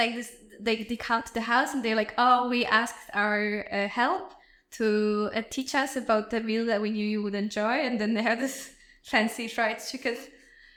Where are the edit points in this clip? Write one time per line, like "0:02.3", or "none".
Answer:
none